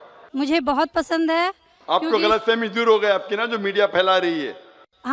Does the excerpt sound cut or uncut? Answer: uncut